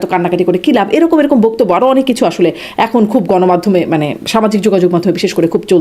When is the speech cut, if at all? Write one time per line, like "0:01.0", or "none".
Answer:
none